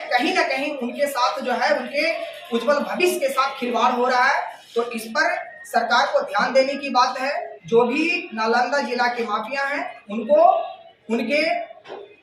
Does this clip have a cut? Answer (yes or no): no